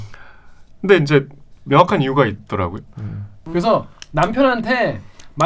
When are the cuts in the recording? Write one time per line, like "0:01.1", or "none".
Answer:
0:03.4